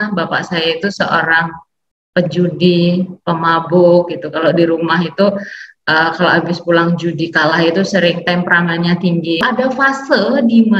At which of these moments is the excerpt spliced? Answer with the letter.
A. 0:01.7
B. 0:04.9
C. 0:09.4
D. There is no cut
C